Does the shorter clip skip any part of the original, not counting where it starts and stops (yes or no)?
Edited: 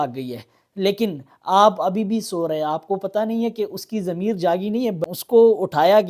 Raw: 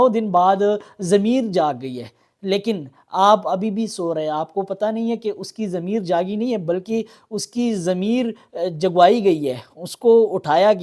yes